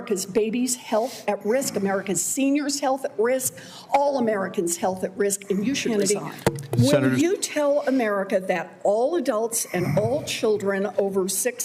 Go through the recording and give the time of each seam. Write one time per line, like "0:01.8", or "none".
0:05.8

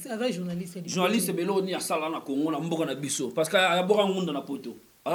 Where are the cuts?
none

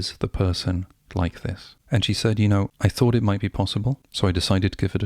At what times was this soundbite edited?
0:01.7
0:02.7
0:04.1

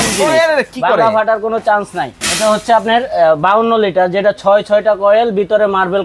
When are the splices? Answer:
0:02.2

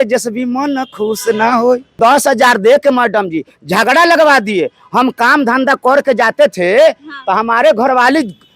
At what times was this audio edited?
0:02.0

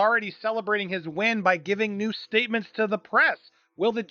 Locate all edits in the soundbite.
none

